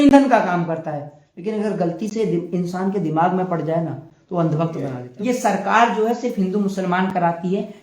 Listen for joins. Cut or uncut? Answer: cut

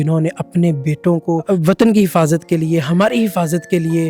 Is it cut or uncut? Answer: cut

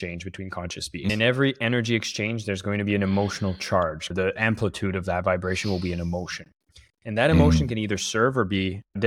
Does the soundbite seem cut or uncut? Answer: cut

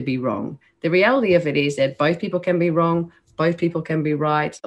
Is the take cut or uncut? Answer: uncut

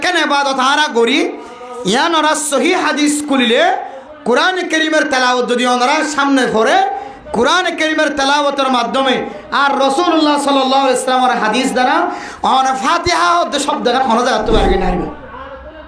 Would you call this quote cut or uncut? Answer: uncut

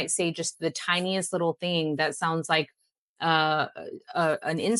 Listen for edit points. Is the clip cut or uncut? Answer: uncut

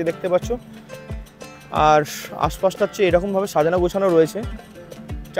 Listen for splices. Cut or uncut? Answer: uncut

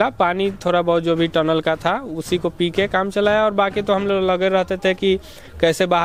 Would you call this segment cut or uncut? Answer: uncut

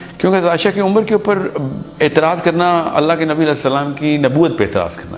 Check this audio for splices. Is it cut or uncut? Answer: uncut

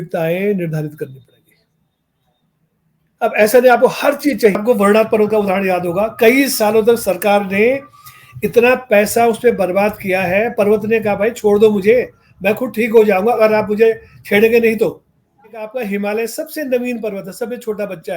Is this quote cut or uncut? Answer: cut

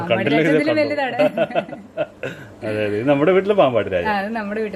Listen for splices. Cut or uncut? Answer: uncut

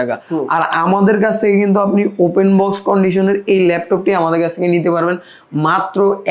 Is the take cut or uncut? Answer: uncut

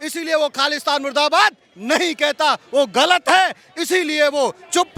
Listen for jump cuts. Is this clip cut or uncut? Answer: uncut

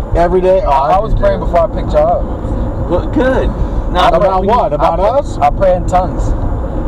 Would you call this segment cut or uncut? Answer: uncut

